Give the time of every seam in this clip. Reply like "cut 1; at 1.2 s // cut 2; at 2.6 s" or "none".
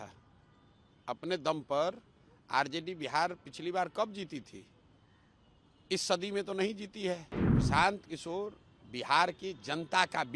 cut 1; at 7.4 s